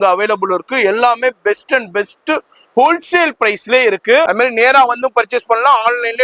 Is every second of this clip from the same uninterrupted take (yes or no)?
no